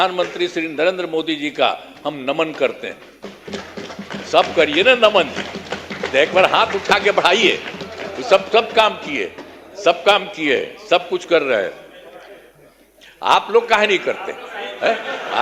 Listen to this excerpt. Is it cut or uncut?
uncut